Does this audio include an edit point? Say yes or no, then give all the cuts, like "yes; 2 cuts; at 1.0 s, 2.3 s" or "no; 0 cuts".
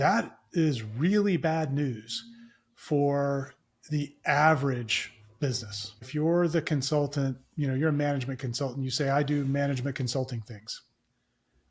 yes; 1 cut; at 6.0 s